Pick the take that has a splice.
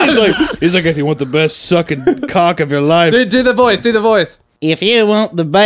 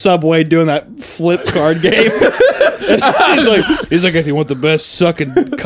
first; 1 cut; at 4.4 s

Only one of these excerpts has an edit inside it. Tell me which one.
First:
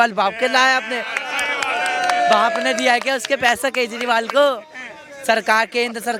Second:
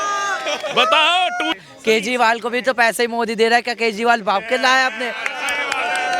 second; 1 cut; at 1.6 s

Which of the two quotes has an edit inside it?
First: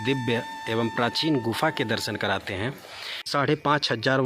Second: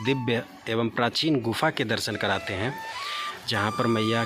first; 1 cut; at 3.2 s

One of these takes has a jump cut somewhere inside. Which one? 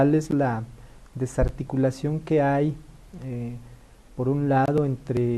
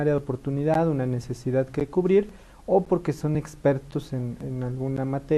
second; 1 cut; at 3.8 s

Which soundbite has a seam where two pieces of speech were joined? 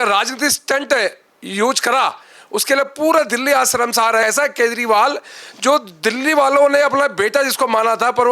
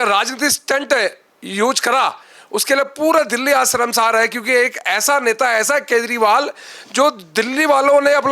first; 1 cut; at 4.2 s

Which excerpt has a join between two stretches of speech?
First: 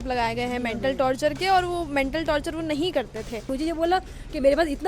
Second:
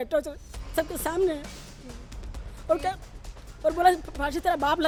first; 1 cut; at 3.5 s

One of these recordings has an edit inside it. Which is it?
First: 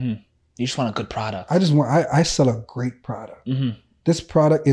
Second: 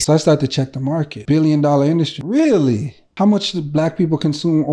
second; 3 cuts; at 1.1 s, 2.2 s, 3.0 s

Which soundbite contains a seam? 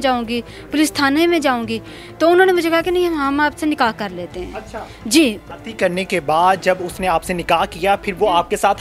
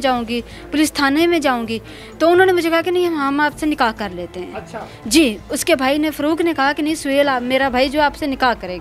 first; 1 cut; at 5.5 s

